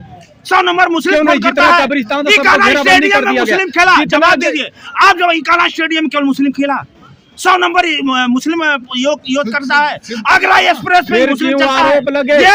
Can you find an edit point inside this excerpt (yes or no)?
no